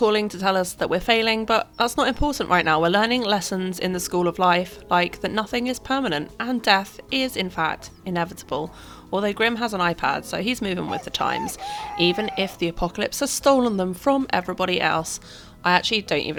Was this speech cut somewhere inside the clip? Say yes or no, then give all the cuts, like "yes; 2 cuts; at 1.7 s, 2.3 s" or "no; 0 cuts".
no; 0 cuts